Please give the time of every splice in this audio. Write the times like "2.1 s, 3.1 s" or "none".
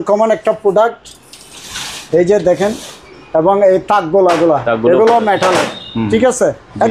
none